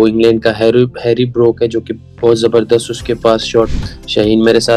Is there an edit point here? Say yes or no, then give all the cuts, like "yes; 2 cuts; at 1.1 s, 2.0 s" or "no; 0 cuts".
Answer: yes; 1 cut; at 3.7 s